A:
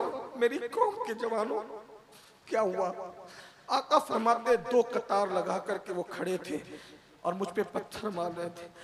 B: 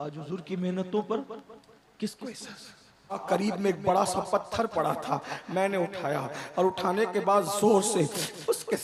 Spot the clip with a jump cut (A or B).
B